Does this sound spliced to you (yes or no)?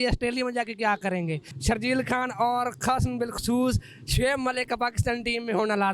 yes